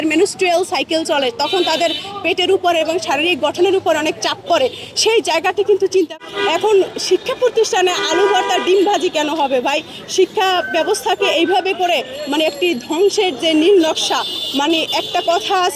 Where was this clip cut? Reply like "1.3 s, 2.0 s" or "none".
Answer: 6.2 s